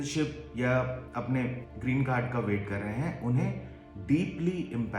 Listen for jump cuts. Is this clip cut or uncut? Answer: cut